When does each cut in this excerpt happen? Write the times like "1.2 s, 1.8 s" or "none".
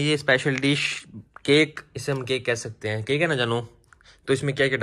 none